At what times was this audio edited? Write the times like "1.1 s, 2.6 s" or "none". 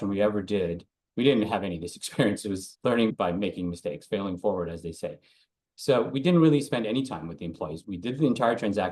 3.1 s